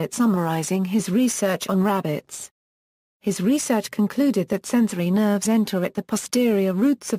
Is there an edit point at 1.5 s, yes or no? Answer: no